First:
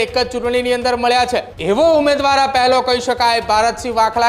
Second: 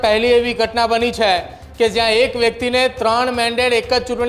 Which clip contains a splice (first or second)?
first